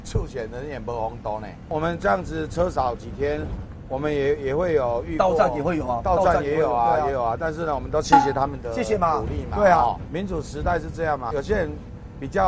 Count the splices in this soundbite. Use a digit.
3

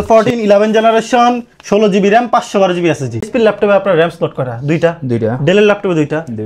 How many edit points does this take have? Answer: 1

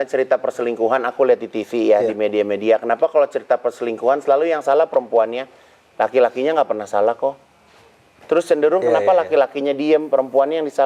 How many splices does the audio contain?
0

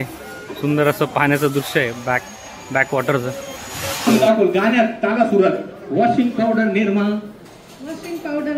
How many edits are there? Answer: 1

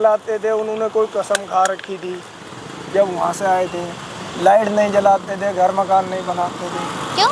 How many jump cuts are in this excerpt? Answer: 0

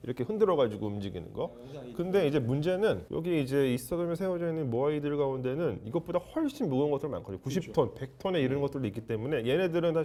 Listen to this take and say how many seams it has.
0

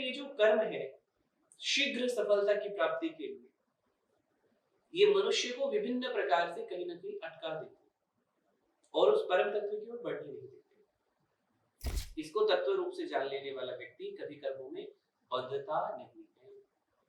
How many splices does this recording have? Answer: 1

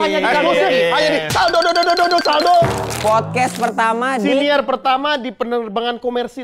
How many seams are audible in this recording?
1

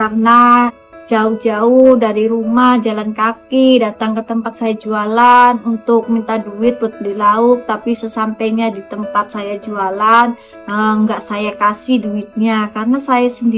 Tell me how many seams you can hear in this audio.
1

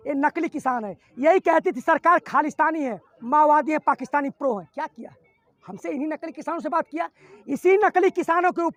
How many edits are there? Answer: 0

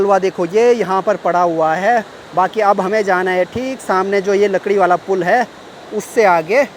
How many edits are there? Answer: 0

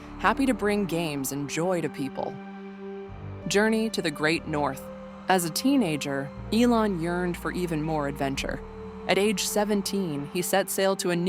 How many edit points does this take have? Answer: 1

